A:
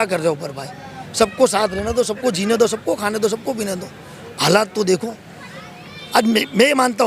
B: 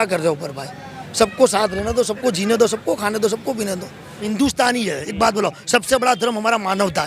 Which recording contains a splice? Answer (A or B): B